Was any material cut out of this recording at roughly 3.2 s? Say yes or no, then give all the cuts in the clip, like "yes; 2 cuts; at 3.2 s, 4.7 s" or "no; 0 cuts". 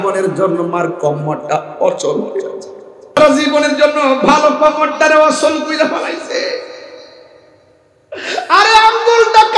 yes; 1 cut; at 3.2 s